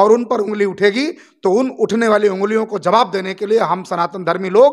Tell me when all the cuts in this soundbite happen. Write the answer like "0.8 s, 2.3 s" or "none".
none

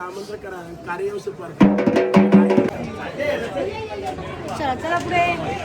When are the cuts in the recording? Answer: 2.7 s

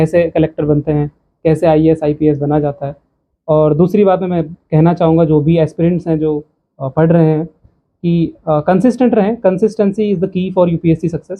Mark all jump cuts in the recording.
none

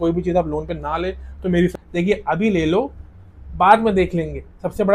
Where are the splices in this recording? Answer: 1.7 s

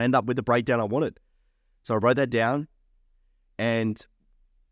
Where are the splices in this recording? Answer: none

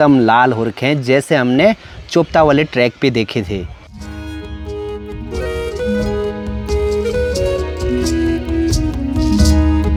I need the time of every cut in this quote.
none

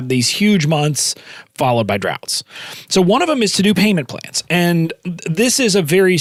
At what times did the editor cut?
none

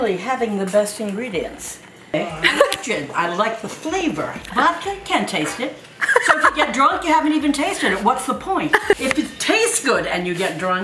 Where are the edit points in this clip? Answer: 2.1 s, 4.4 s, 9.0 s

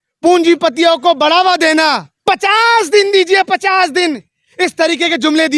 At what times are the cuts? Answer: 2.1 s

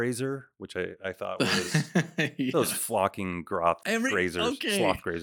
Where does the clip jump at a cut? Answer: 3.8 s

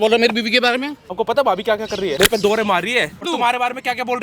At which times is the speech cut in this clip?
1.1 s, 2.1 s, 3.2 s

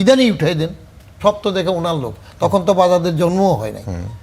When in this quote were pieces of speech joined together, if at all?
1.2 s

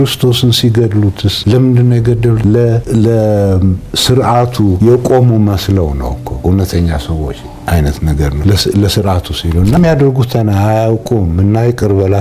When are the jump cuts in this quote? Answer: 1.3 s, 2.8 s, 4.8 s, 6.3 s, 8.4 s, 9.8 s

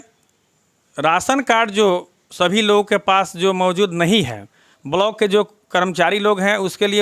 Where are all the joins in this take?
4.7 s

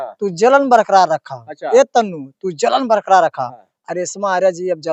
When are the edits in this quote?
none

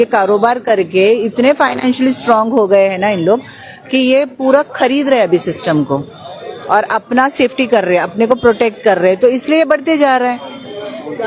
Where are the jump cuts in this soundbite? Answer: none

